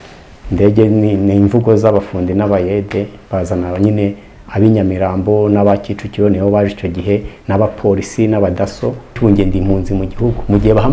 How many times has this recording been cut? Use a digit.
1